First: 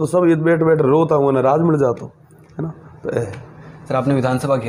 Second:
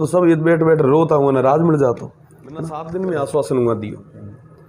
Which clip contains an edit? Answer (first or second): second